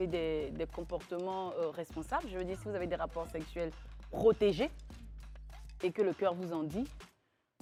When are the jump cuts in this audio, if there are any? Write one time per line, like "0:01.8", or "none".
none